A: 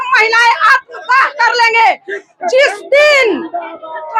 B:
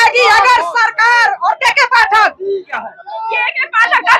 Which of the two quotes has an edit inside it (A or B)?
B